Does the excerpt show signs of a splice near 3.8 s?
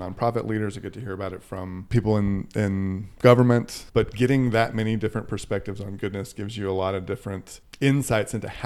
yes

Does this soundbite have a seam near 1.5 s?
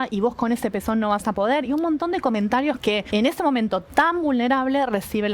no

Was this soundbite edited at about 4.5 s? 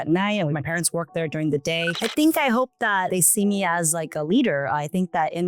no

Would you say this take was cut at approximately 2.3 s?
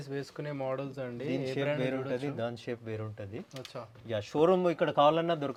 no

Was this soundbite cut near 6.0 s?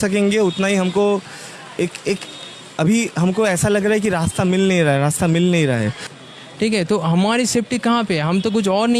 yes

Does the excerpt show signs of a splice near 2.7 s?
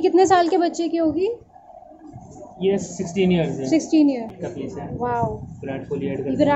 no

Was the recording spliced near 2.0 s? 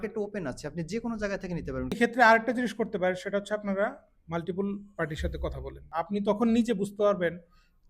yes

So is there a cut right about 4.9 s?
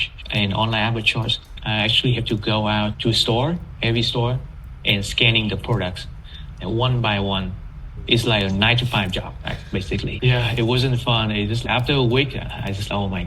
no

